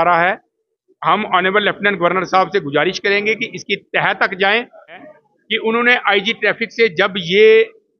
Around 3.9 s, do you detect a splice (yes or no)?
no